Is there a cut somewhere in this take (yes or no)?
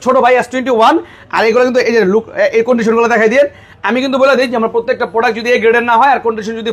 no